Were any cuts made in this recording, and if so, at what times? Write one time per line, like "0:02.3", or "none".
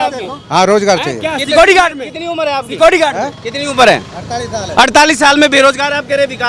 none